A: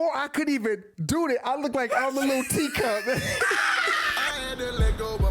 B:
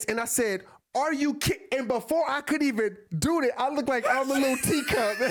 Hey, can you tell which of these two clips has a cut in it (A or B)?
A